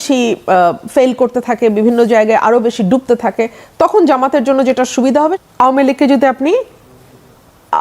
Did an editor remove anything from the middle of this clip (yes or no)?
yes